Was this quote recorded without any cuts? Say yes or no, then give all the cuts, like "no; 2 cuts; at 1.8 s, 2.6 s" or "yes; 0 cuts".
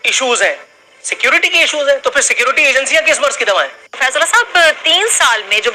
no; 1 cut; at 3.8 s